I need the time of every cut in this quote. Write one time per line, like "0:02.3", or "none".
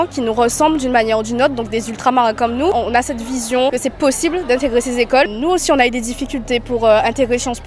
0:02.7
0:05.3